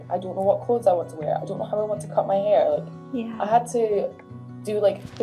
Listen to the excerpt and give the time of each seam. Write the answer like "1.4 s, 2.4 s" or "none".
none